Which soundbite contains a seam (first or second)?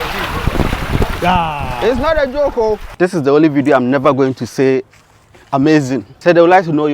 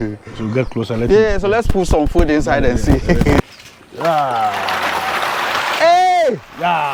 first